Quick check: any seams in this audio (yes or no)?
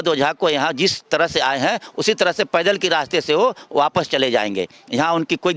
no